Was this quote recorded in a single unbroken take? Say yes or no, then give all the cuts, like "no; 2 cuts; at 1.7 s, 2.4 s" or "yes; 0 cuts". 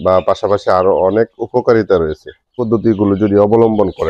no; 1 cut; at 2.6 s